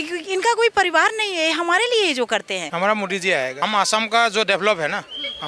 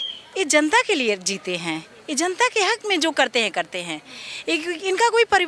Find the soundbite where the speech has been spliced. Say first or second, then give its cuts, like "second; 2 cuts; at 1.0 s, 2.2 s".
first; 2 cuts; at 2.6 s, 3.7 s